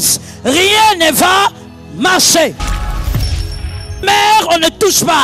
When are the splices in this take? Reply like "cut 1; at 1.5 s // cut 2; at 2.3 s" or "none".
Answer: none